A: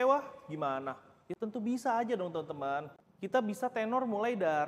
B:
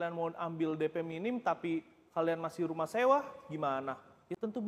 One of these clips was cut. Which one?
A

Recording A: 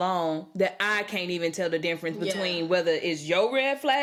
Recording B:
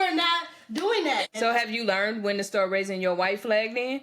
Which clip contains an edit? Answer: B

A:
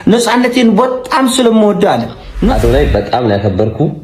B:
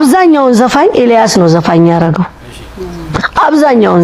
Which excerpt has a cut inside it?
A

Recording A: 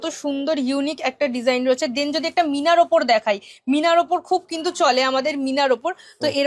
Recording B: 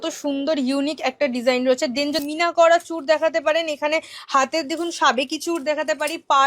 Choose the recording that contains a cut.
B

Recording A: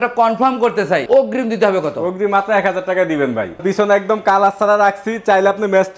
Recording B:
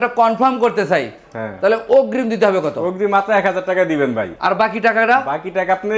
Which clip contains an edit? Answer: A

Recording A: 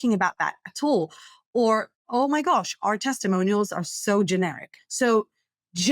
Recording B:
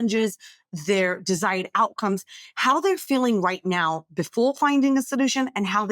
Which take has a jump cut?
A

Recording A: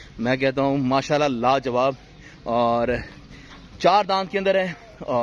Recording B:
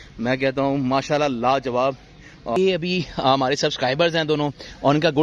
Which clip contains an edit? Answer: B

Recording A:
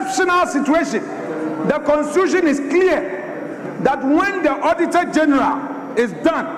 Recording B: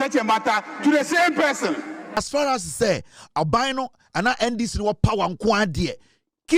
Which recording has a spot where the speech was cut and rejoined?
B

